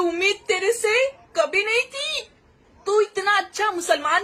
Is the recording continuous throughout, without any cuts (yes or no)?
yes